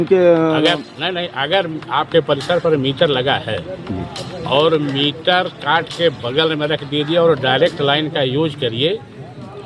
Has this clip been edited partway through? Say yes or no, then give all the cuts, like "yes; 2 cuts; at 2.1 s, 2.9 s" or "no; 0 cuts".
no; 0 cuts